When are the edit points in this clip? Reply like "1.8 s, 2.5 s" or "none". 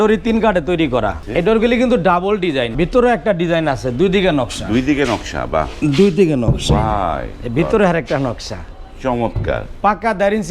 1.2 s, 2.7 s

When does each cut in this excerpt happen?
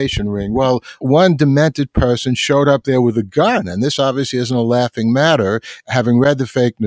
1.0 s

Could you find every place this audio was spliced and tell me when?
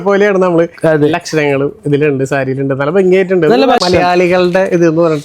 3.8 s

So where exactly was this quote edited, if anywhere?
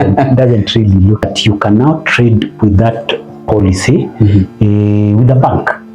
1.2 s

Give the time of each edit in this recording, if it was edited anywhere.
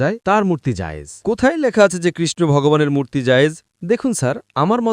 3.7 s

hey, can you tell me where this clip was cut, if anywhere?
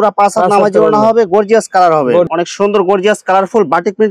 2.3 s

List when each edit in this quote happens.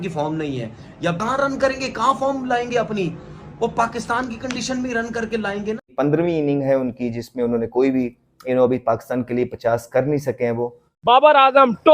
1.2 s, 5.8 s, 11.0 s

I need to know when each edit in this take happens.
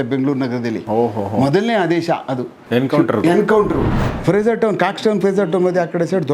3.9 s

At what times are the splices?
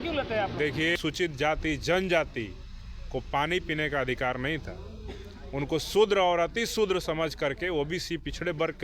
1.0 s

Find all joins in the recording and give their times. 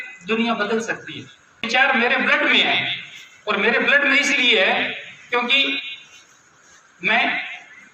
1.7 s

